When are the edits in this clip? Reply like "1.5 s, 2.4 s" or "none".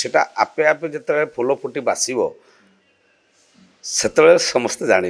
none